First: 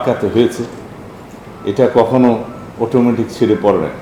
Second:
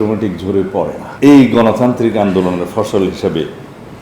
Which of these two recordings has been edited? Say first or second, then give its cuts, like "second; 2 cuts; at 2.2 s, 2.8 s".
second; 1 cut; at 1.0 s